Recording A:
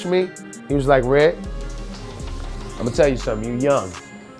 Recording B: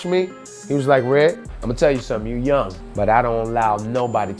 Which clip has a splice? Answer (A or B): B